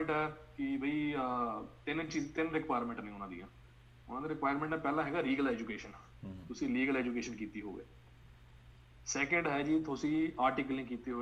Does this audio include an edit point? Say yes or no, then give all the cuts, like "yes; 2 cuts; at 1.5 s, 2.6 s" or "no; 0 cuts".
no; 0 cuts